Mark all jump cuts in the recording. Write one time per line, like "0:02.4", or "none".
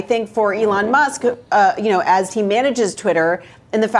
none